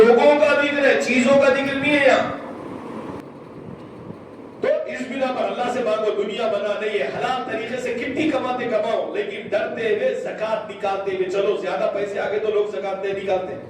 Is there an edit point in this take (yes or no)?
yes